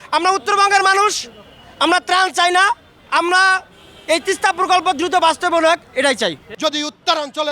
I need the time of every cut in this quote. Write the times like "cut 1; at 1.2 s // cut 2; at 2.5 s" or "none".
cut 1; at 6.4 s